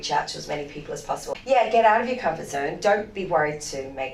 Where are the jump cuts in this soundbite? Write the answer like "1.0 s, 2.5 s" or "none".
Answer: 1.2 s